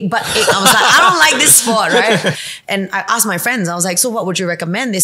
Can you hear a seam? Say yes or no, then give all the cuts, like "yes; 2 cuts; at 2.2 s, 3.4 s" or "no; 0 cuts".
yes; 1 cut; at 2.5 s